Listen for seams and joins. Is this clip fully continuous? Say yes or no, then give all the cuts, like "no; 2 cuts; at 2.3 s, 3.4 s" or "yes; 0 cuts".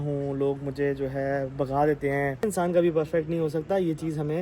no; 1 cut; at 2.4 s